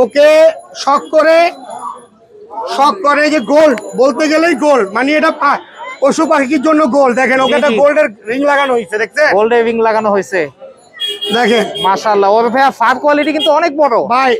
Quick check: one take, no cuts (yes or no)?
yes